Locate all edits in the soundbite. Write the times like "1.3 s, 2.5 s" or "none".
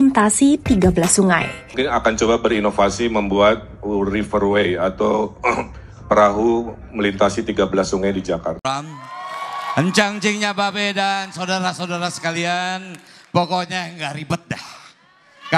1.7 s, 8.6 s